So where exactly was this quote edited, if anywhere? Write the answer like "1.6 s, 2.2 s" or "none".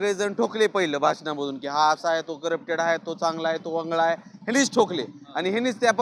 none